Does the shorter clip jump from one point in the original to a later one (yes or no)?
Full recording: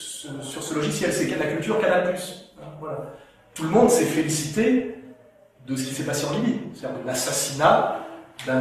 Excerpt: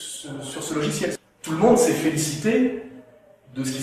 yes